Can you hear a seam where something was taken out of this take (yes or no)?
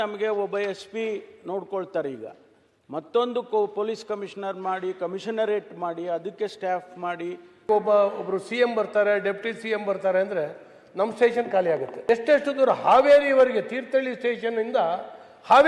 yes